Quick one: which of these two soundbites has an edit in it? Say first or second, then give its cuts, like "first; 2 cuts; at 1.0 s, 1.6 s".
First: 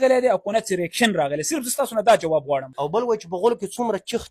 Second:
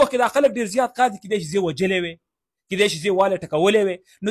first; 1 cut; at 2.7 s